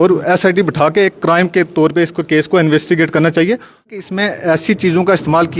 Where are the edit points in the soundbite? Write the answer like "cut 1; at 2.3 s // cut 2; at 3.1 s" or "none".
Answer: cut 1; at 4.0 s